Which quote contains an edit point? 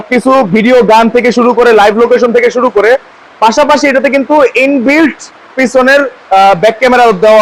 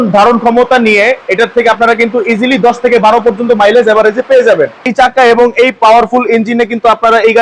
second; 1 cut; at 4.8 s

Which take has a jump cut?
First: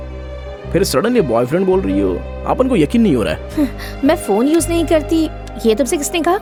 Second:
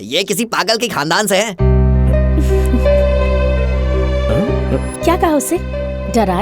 second; 1 cut; at 1.5 s

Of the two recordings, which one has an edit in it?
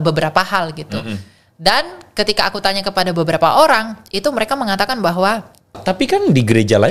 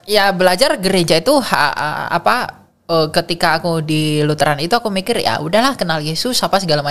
first; 1 cut; at 5.8 s

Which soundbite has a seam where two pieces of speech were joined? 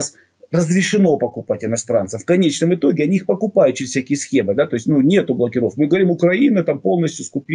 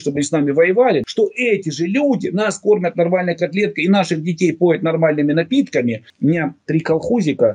second; 2 cuts; at 1.0 s, 6.1 s

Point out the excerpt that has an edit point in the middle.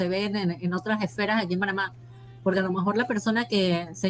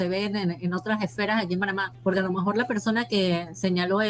second; 1 cut; at 1.9 s

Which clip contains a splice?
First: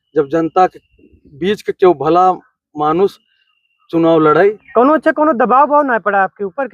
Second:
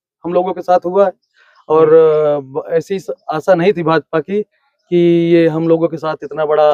first; 1 cut; at 4.6 s

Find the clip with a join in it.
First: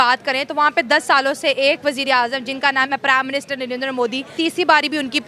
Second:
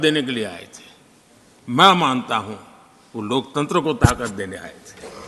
first; 1 cut; at 4.3 s

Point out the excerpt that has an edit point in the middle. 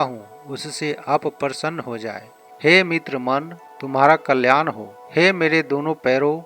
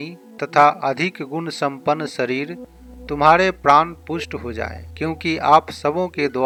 first; 1 cut; at 2.4 s

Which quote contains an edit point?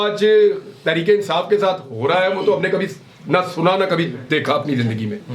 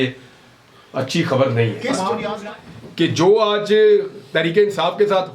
second; 1 cut; at 2.3 s

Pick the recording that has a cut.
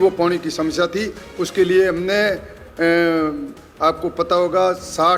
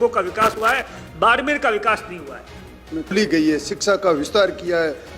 second; 1 cut; at 3.1 s

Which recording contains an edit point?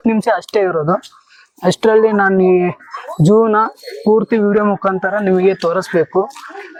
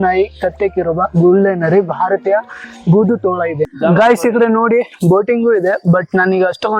second; 1 cut; at 3.7 s

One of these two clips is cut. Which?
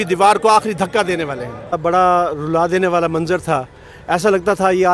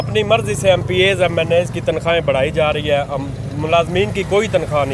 first; 1 cut; at 1.7 s

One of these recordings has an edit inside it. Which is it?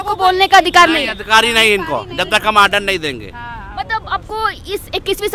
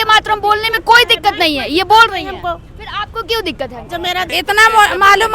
second; 1 cut; at 4.3 s

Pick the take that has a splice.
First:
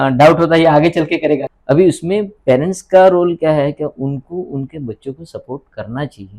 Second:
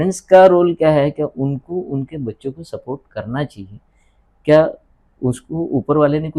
first; 1 cut; at 1.4 s

